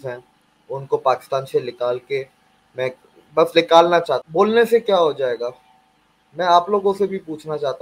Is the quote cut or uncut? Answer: cut